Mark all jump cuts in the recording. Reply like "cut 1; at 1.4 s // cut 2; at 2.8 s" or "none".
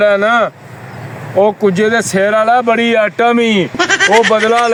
none

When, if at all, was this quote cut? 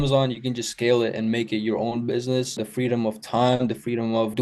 none

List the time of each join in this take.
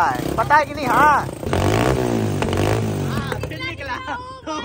cut 1; at 1.4 s

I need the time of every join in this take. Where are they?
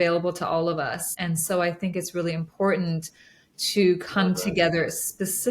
cut 1; at 1.1 s

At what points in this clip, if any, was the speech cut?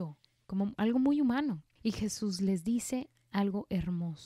cut 1; at 1.7 s

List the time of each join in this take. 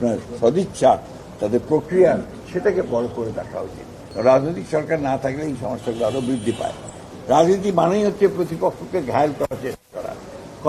cut 1; at 4.0 s // cut 2; at 7.0 s

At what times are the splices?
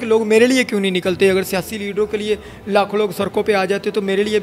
none

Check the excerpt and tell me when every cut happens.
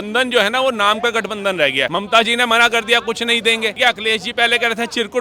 cut 1; at 1.9 s // cut 2; at 3.7 s

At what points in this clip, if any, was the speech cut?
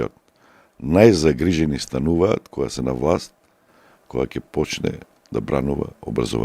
none

